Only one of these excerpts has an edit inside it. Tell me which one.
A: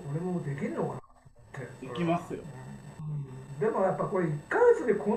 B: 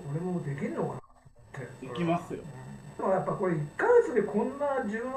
B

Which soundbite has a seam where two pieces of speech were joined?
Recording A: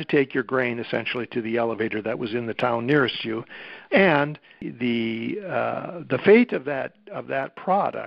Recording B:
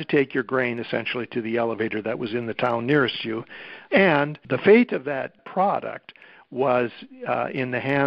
B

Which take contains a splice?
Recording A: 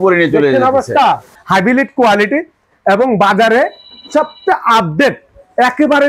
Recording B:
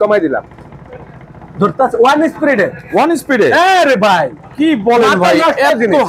A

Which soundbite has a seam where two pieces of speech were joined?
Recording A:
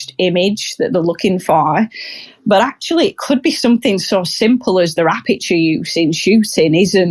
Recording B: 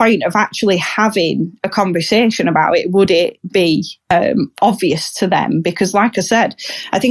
B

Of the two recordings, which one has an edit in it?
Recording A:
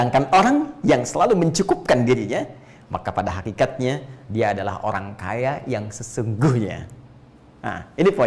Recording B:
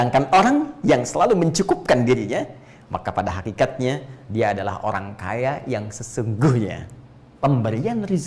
B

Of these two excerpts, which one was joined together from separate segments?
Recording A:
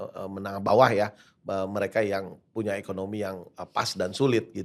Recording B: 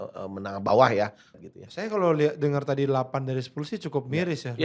B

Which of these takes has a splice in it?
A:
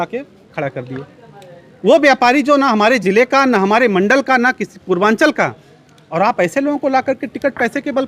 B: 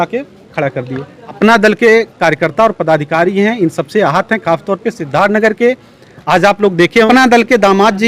B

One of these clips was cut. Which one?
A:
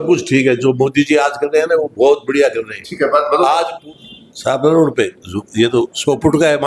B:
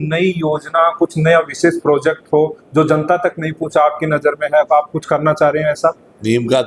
A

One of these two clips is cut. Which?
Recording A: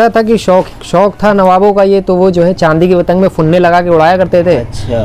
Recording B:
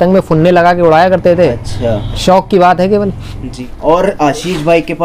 B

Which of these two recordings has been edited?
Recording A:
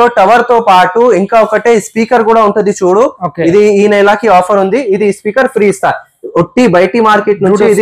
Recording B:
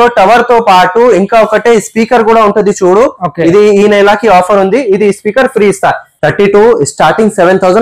B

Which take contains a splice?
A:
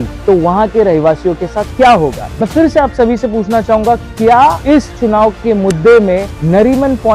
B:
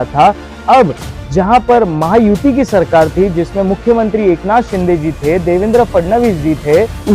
A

